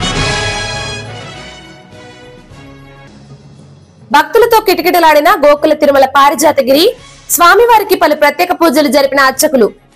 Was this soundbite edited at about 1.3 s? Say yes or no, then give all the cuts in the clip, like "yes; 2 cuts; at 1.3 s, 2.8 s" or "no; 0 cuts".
yes; 1 cut; at 1.3 s